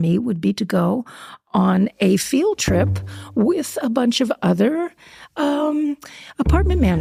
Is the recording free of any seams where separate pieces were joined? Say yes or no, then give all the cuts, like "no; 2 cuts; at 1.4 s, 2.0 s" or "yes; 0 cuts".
yes; 0 cuts